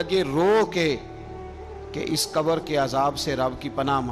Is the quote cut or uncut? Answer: uncut